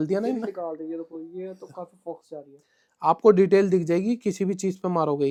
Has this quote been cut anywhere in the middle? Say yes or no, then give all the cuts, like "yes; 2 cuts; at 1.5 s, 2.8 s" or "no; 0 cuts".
no; 0 cuts